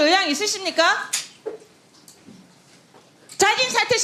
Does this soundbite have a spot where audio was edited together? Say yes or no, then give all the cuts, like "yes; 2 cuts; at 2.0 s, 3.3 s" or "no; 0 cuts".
no; 0 cuts